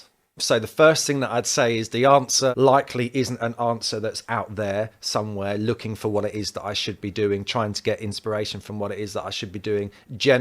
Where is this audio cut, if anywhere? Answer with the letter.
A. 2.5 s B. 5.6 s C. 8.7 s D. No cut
A